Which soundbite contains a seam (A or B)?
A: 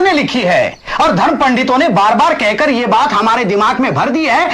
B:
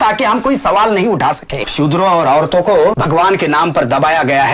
B